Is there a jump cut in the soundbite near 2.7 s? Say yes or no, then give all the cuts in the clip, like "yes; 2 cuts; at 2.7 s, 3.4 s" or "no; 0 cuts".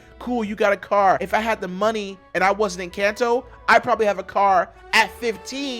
no; 1 cut; at 1.2 s